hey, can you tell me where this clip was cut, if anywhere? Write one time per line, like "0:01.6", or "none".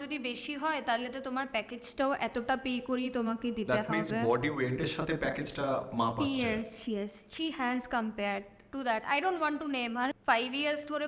0:10.1